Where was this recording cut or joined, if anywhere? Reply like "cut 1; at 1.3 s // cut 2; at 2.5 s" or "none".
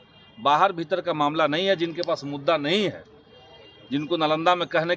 none